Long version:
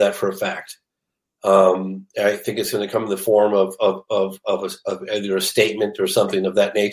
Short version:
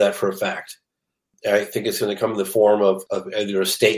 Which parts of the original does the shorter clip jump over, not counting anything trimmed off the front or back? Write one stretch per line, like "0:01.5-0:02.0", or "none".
0:01.2-0:02.0
0:03.7-0:04.8